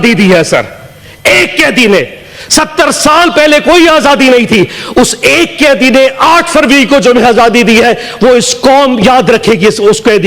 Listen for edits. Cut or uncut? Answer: uncut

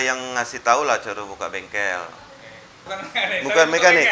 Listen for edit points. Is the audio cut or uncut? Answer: cut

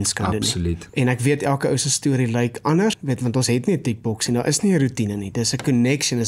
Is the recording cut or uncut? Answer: cut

